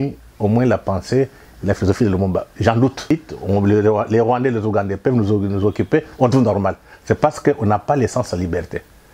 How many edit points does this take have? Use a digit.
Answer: 1